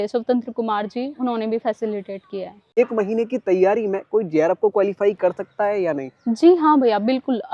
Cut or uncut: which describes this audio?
cut